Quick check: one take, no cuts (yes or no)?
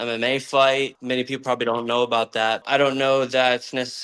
no